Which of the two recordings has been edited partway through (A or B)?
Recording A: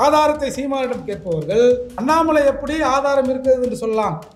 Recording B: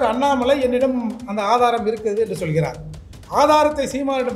A